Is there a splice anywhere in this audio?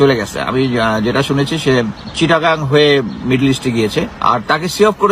yes; 2 cuts; at 2.0 s, 4.1 s

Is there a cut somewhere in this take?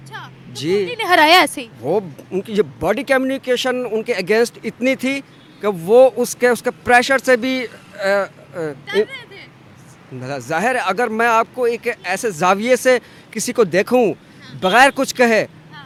no; 0 cuts

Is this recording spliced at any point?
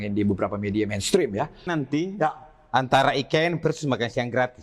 yes; 1 cut; at 1.7 s

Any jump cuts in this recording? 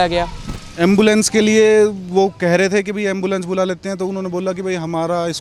no; 0 cuts

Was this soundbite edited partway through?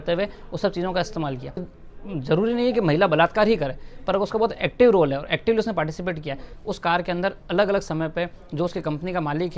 yes; 2 cuts; at 1.8 s, 6.5 s

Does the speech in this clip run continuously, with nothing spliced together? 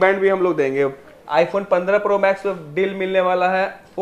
no; 1 cut; at 1.1 s

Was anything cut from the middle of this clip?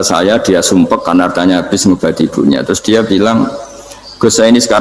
no; 0 cuts

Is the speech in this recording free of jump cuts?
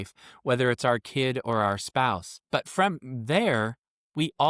no; 1 cut; at 2.3 s

